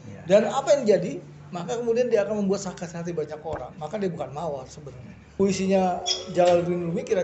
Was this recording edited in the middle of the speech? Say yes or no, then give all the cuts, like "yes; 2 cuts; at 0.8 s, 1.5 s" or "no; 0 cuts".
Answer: yes; 1 cut; at 5.4 s